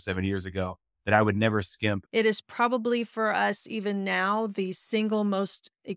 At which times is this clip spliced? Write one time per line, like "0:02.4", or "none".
0:02.0